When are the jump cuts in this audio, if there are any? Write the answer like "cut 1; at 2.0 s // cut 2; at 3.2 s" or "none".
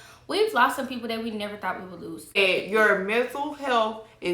cut 1; at 2.4 s